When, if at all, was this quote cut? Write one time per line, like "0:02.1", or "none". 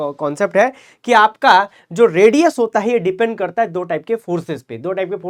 none